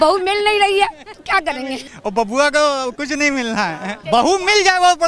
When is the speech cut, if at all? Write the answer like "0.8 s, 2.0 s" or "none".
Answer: 1.8 s, 3.9 s